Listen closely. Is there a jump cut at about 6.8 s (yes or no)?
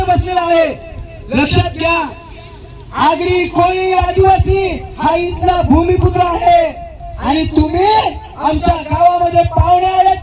no